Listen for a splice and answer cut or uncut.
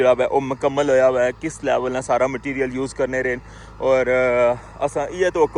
uncut